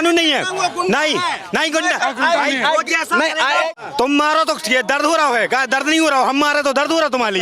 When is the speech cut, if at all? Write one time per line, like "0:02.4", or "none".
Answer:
0:03.7